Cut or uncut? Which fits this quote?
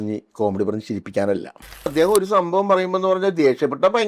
cut